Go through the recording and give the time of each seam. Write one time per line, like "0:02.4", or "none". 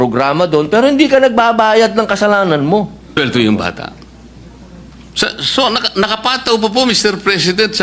0:03.2